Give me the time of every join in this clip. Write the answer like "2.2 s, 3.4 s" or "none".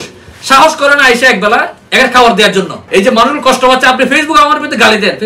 2.8 s